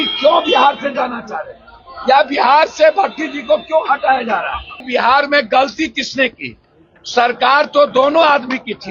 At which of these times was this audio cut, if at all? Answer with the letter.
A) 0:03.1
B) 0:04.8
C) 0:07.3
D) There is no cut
B